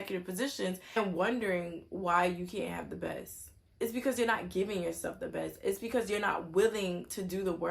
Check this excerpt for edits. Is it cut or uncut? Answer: cut